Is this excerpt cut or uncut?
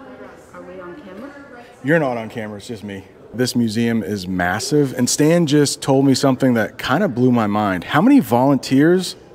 cut